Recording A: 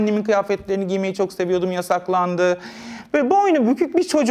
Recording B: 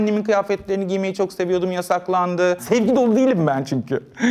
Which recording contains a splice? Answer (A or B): B